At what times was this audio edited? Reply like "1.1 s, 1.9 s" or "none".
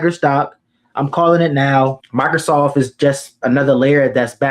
2.0 s